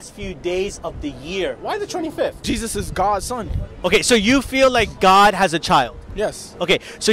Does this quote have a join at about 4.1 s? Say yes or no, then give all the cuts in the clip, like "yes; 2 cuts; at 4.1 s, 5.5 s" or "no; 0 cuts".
no; 1 cut; at 2.4 s